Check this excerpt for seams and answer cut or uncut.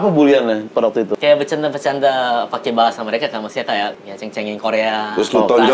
cut